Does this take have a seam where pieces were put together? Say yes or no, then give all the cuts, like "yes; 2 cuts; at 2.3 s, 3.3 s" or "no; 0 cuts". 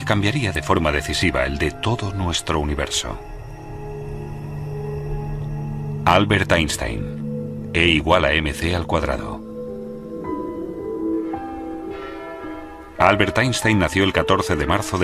yes; 1 cut; at 13.1 s